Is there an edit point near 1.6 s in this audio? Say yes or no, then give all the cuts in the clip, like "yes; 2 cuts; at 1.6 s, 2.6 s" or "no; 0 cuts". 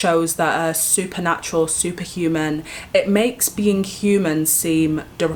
no; 0 cuts